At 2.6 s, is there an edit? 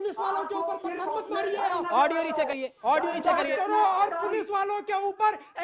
no; 0 cuts

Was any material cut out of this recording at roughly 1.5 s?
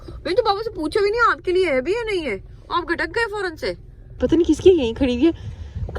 no; 1 cut; at 4.2 s

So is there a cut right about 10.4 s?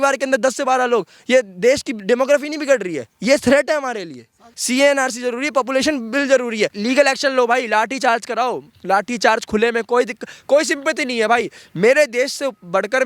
no; 2 cuts; at 4.5 s, 6.8 s

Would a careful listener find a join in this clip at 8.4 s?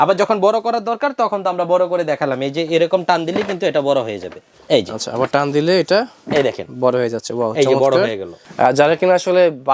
yes; 1 cut; at 8.4 s

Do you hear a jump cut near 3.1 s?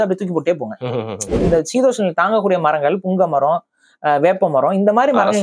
no; 1 cut; at 1.4 s

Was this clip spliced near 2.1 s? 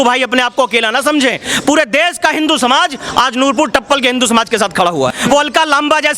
no; 1 cut; at 5.1 s

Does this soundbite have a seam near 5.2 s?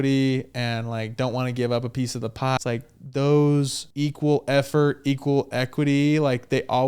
no; 2 cuts; at 2.6 s, 3.8 s

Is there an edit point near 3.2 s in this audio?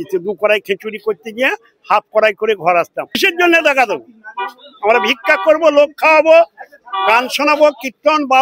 yes; 1 cut; at 3.2 s

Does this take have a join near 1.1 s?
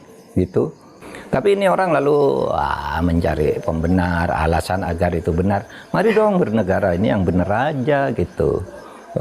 yes; 1 cut; at 1.1 s

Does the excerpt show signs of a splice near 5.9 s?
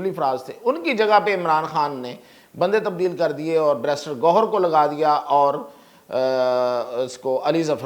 no; 0 cuts

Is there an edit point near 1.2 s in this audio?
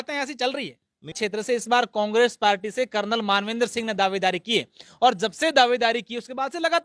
yes; 1 cut; at 1.2 s

